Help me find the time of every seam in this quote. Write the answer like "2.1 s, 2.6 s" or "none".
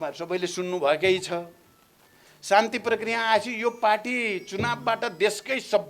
none